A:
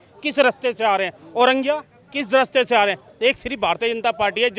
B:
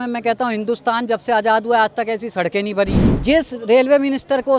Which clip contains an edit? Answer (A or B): B